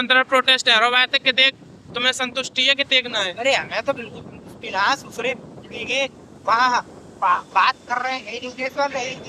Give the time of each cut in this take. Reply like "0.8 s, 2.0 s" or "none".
6.0 s